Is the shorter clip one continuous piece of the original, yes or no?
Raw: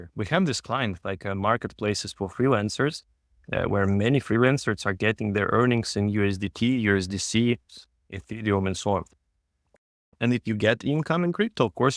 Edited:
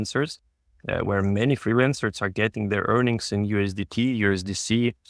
yes